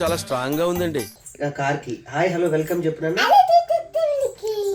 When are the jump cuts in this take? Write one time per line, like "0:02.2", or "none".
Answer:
none